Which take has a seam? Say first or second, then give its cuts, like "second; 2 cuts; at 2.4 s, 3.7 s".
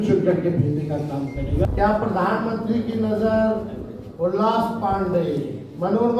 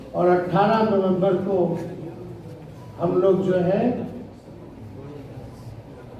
first; 1 cut; at 1.7 s